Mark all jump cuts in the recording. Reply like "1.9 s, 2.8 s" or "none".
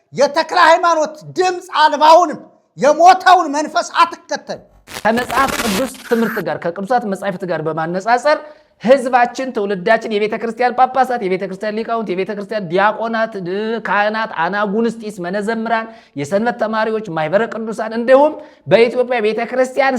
4.8 s